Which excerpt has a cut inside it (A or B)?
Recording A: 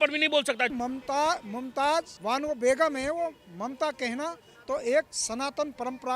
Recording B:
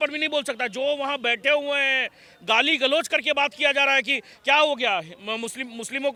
A